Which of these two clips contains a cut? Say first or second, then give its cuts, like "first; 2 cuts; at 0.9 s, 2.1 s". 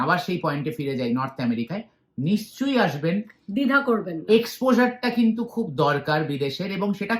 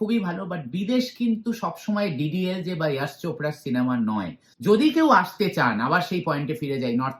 second; 1 cut; at 4.4 s